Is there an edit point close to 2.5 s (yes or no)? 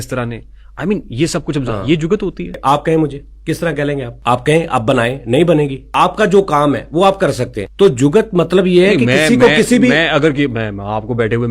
yes